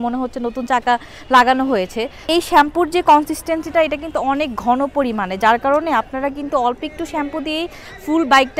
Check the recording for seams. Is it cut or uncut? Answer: uncut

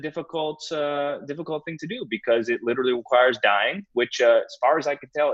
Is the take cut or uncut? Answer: uncut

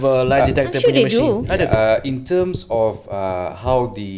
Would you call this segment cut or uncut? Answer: uncut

